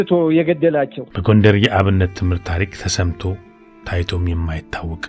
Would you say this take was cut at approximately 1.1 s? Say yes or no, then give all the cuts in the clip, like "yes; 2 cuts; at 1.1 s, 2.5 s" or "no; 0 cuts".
yes; 1 cut; at 1.1 s